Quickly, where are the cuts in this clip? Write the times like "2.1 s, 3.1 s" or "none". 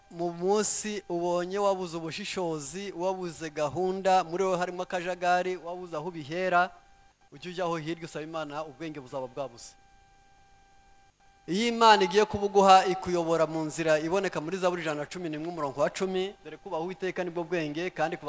10.4 s